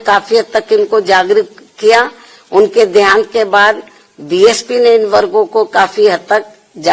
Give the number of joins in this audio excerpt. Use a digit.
0